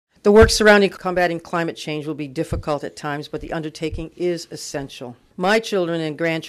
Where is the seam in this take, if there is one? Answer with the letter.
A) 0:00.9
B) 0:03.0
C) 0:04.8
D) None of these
A